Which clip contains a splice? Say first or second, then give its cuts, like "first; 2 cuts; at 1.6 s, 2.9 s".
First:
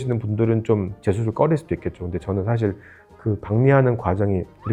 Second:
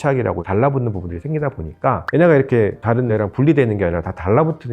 second; 3 cuts; at 1.1 s, 2.0 s, 3.0 s